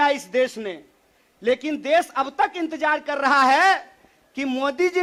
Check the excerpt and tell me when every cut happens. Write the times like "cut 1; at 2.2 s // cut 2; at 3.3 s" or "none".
none